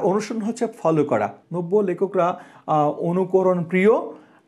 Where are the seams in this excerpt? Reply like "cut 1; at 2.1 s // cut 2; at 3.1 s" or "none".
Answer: cut 1; at 1.4 s